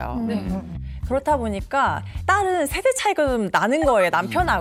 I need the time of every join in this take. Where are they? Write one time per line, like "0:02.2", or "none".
none

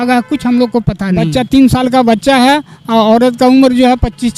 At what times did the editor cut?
0:01.2

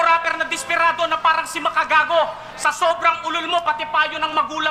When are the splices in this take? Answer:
none

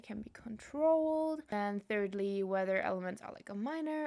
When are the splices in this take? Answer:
0:01.5

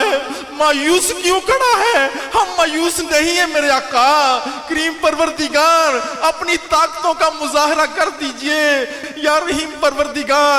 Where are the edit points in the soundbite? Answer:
0:09.0

